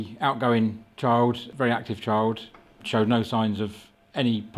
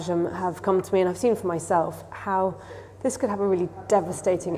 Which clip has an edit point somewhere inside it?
first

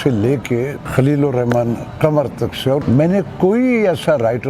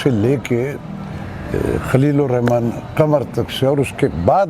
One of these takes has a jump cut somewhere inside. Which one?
first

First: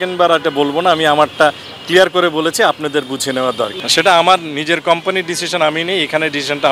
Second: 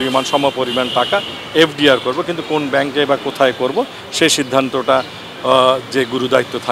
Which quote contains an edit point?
first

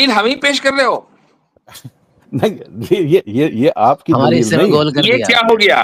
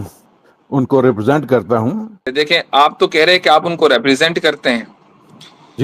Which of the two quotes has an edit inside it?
second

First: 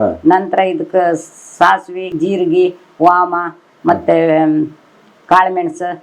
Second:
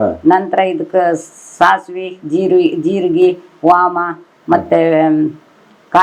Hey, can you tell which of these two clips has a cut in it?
first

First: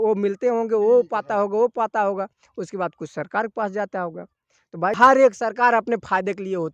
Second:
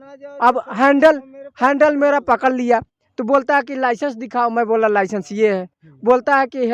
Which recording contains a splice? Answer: first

